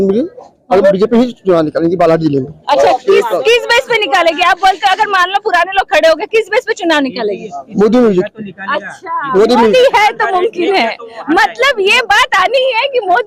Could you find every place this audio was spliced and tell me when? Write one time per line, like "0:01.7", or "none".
none